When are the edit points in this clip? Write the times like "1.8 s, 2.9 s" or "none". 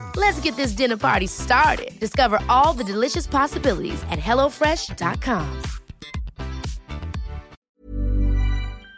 7.5 s